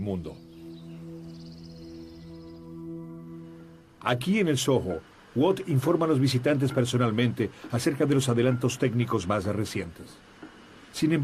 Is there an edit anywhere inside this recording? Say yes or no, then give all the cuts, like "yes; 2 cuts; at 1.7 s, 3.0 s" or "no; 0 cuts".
no; 0 cuts